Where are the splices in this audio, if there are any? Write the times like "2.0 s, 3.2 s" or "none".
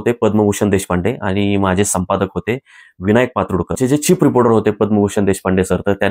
3.8 s